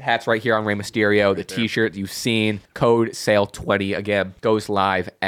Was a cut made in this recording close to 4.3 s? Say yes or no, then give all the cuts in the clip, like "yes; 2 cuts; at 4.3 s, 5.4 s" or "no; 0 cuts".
yes; 2 cuts; at 2.7 s, 4.3 s